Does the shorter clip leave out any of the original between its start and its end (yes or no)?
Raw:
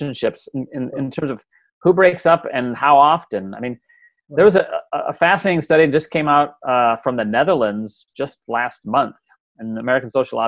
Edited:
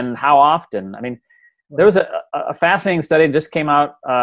no